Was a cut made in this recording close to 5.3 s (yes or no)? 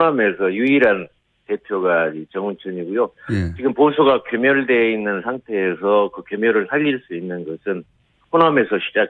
no